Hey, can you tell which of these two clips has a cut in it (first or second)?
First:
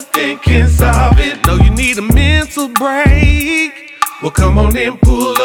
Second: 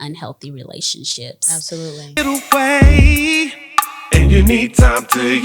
second